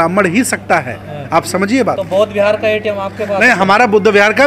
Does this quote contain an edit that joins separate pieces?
no; 0 cuts

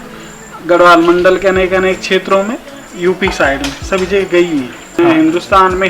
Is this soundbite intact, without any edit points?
no; 1 cut; at 4.8 s

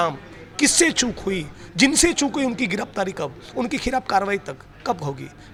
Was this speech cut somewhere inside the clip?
no; 0 cuts

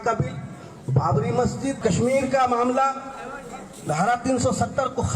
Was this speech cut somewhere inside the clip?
yes; 1 cut; at 1.8 s

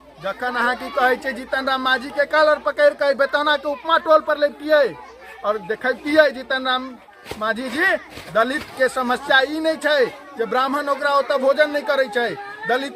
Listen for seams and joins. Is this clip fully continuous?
yes; 0 cuts

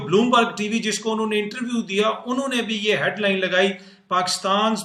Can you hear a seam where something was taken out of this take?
no; 0 cuts

